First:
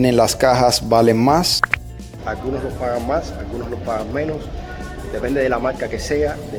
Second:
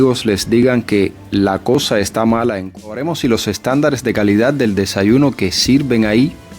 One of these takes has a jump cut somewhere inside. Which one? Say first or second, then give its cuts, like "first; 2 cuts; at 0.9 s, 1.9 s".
second; 1 cut; at 2.7 s